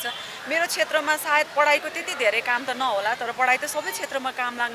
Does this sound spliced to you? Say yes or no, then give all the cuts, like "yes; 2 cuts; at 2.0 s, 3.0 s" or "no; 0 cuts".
no; 0 cuts